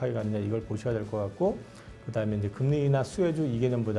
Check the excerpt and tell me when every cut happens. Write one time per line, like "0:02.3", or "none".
none